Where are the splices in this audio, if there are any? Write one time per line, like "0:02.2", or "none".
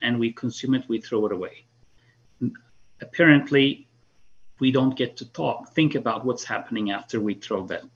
none